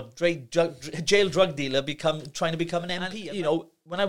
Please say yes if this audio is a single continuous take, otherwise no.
no